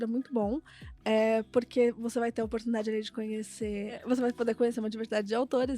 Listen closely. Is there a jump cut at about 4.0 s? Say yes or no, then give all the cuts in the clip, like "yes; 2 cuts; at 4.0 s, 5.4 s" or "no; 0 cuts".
yes; 1 cut; at 4.0 s